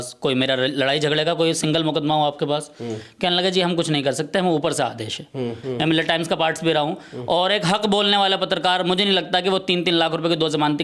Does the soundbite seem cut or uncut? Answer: cut